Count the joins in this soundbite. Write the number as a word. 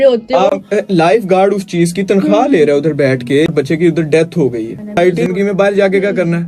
two